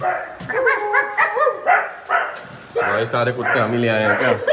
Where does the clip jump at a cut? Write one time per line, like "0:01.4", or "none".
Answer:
none